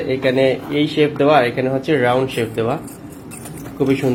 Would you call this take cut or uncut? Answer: uncut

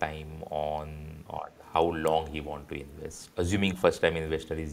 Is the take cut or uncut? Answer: cut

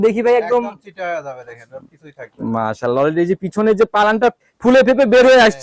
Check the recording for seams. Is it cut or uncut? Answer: cut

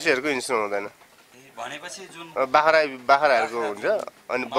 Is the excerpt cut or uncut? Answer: uncut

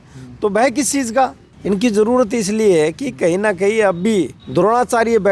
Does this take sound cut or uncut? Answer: cut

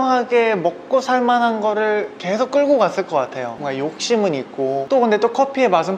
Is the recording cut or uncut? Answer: uncut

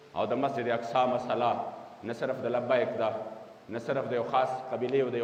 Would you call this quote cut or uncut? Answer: uncut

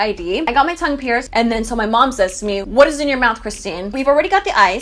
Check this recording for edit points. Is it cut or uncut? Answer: cut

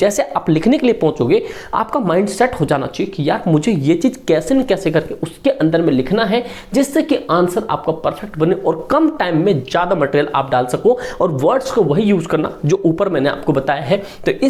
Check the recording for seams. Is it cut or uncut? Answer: uncut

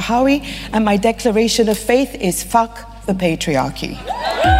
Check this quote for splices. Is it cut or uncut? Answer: uncut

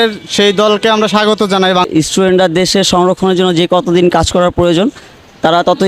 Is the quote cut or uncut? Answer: cut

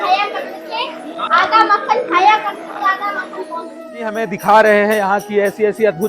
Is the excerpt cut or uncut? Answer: cut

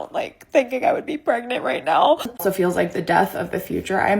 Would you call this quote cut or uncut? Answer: cut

